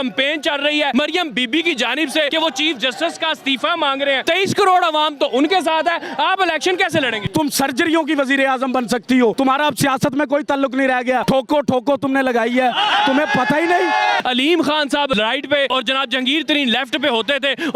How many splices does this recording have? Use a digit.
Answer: 8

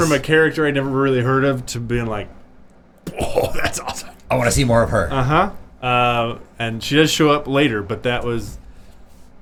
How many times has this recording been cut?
0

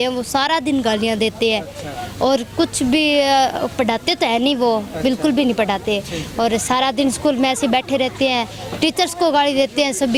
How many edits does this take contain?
0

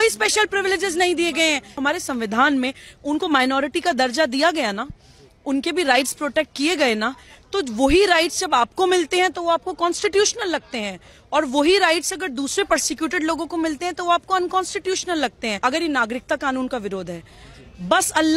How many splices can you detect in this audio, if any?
2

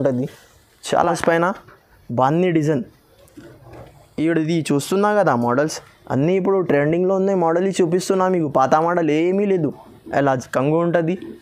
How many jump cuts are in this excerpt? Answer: 1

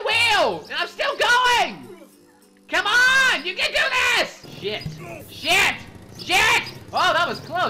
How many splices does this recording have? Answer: 1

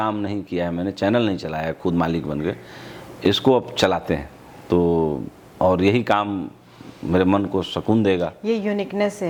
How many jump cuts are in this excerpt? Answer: 0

